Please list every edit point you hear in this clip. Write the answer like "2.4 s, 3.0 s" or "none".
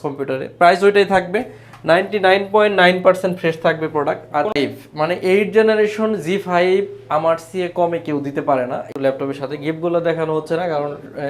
4.5 s, 8.9 s